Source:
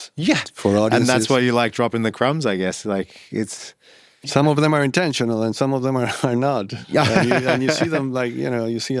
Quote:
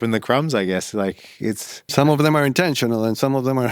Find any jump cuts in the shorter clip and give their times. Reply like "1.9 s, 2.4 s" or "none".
1.7 s